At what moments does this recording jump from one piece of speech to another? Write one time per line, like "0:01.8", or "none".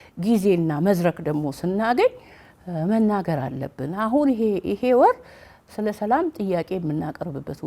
none